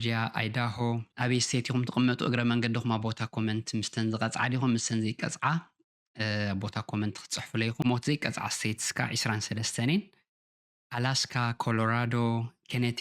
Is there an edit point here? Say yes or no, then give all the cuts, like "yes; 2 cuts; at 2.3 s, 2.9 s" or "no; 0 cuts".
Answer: yes; 1 cut; at 1.1 s